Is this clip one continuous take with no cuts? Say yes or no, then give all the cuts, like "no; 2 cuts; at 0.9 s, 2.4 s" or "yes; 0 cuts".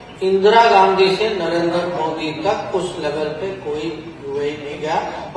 yes; 0 cuts